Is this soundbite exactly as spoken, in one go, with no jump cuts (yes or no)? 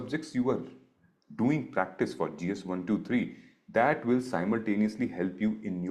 yes